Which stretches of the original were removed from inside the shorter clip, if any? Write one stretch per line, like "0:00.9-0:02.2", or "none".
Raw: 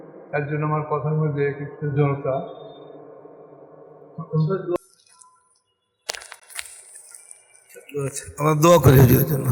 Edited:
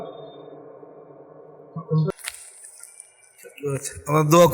0:04.5-0:06.4